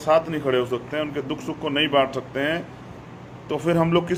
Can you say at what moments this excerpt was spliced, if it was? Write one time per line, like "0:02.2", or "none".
none